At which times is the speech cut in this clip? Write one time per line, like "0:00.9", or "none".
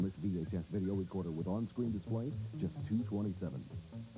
none

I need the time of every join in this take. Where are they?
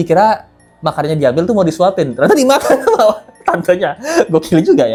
none

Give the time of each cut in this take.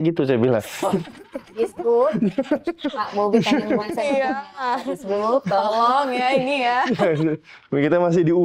none

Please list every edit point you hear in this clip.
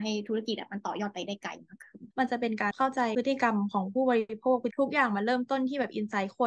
0:02.0

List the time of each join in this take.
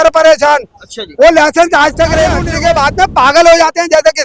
0:02.5

